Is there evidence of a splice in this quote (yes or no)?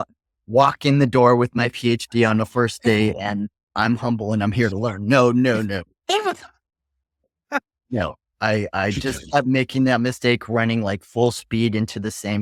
no